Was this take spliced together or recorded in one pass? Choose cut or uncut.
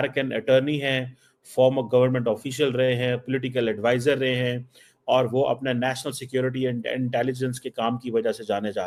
uncut